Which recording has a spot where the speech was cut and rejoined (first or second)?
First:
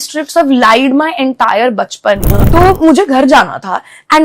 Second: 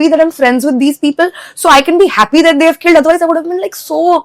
first